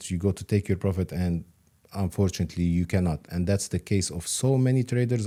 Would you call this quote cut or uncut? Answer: uncut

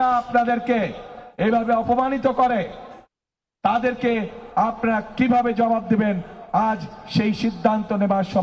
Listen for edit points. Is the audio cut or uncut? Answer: uncut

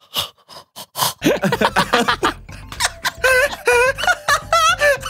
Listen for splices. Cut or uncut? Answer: uncut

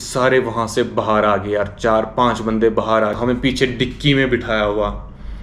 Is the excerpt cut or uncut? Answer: cut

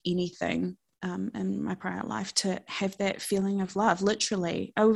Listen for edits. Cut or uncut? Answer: uncut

